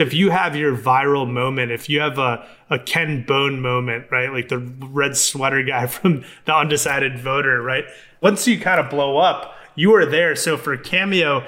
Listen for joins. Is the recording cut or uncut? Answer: cut